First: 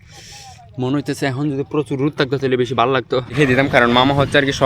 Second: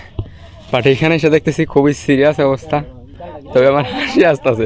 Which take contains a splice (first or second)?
first